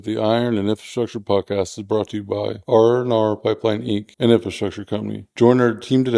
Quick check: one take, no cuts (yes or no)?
yes